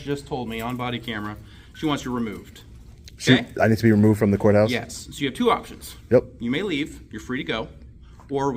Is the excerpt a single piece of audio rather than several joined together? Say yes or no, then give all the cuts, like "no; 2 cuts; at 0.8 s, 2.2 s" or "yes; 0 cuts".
yes; 0 cuts